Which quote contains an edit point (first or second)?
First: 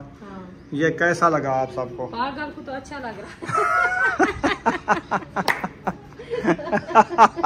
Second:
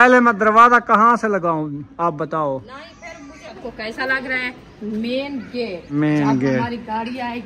second